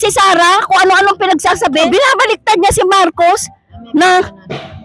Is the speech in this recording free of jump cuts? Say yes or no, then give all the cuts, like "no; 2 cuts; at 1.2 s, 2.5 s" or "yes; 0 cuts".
no; 1 cut; at 1.9 s